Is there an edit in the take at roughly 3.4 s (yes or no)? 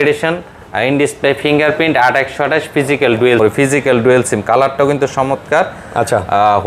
yes